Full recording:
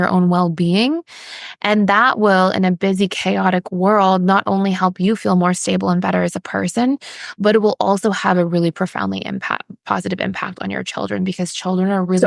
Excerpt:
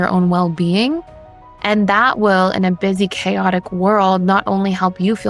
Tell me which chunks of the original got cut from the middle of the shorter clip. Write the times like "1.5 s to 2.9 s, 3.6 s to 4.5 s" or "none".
none